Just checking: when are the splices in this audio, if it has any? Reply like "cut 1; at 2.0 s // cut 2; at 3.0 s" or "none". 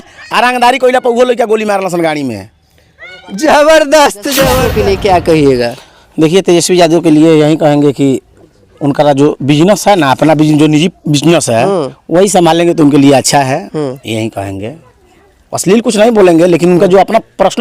cut 1; at 4.7 s